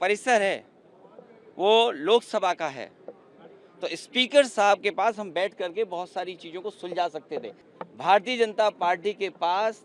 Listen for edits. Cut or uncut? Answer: cut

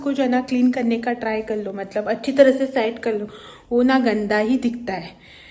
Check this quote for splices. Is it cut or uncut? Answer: uncut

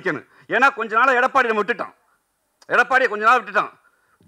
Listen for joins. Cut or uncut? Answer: uncut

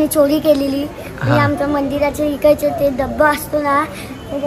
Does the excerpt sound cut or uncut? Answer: uncut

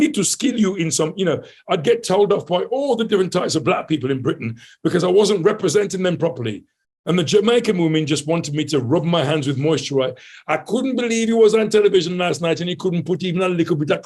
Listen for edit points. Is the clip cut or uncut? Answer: uncut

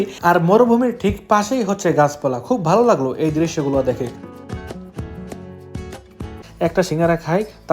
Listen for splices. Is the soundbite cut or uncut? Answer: cut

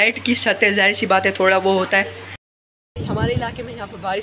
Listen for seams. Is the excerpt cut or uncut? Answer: cut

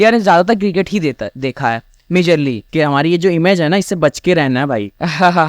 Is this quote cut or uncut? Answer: cut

